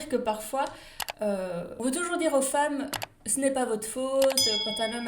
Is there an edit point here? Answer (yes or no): yes